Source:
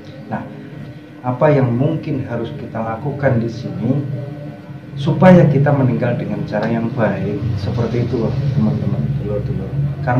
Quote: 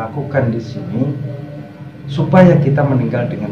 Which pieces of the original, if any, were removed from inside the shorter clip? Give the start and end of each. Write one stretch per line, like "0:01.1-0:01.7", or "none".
none